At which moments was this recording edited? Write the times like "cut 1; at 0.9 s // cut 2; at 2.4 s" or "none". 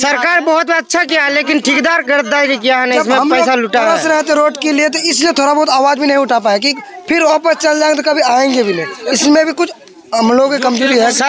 none